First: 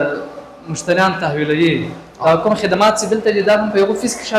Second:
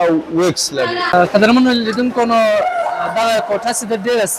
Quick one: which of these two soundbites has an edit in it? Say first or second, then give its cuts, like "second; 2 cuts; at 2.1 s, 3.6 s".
second; 1 cut; at 1.0 s